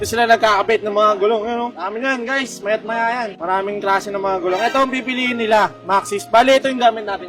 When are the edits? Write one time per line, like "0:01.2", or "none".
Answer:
none